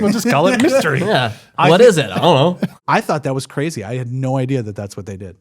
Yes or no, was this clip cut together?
yes